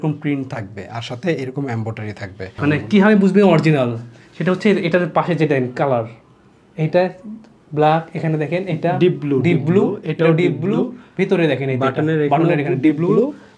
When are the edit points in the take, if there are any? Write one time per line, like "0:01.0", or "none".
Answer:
0:02.6